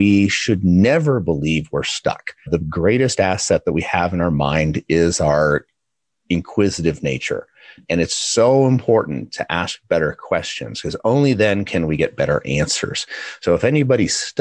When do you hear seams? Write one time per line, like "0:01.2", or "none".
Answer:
0:02.5
0:07.8